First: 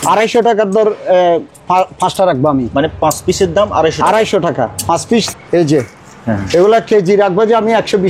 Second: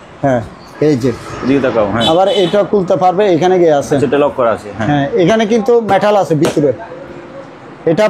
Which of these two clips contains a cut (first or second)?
first